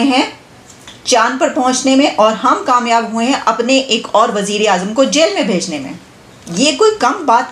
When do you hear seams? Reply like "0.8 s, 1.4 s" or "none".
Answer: none